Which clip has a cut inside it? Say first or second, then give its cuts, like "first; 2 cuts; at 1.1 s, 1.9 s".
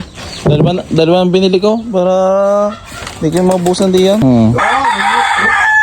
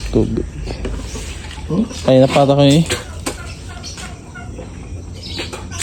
first; 1 cut; at 4.2 s